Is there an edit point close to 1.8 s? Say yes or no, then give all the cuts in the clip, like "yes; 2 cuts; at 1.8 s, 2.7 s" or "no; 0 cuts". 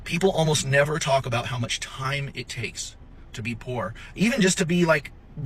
no; 0 cuts